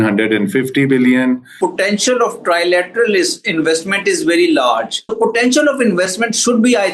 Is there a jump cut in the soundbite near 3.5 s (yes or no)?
no